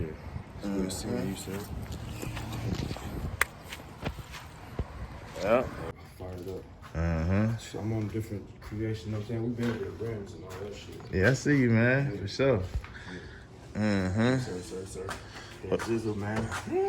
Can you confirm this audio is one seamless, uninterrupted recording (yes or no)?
no